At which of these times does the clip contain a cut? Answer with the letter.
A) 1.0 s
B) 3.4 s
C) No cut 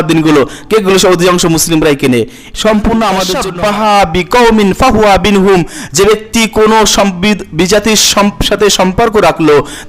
B